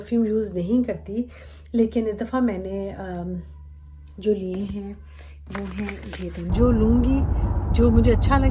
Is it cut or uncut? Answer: cut